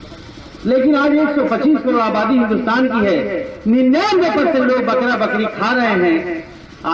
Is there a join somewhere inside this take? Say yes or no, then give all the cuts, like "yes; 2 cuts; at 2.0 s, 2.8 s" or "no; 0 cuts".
no; 0 cuts